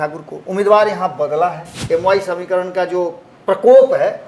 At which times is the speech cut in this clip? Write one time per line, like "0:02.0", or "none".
0:01.7